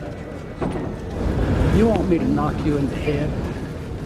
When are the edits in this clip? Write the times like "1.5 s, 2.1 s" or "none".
1.1 s